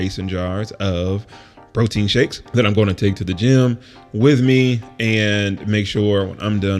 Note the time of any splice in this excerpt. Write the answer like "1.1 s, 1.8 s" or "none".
2.4 s